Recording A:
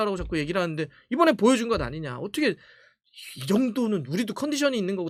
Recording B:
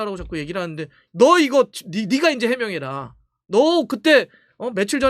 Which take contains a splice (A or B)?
B